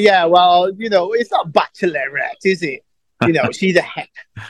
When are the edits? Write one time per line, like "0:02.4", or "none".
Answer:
none